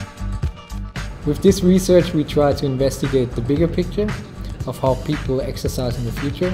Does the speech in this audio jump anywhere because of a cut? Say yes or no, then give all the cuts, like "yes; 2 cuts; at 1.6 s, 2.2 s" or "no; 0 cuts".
no; 0 cuts